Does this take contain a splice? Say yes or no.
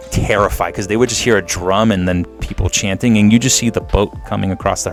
no